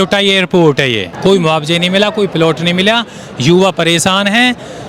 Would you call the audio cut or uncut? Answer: cut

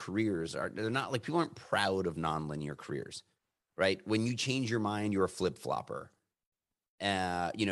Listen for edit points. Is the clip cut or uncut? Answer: uncut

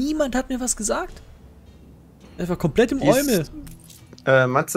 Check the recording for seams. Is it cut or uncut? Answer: uncut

